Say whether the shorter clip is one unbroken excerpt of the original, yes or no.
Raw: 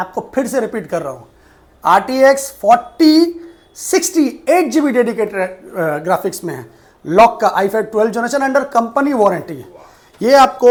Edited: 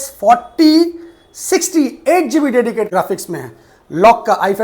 no